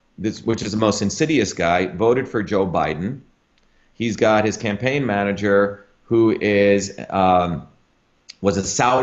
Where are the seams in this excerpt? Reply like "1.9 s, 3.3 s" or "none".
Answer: none